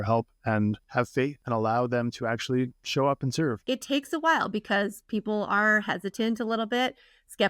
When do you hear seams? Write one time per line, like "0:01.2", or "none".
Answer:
0:01.3
0:03.6